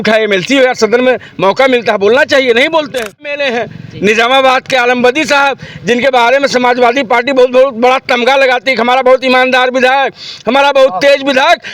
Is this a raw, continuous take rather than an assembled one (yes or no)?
no